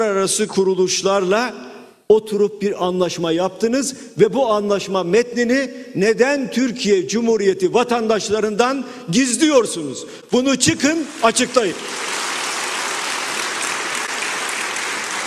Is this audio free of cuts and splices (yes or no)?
yes